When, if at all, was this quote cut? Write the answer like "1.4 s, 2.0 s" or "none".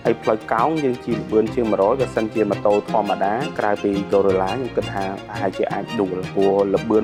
none